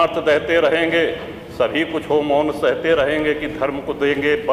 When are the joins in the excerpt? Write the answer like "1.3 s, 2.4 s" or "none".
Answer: none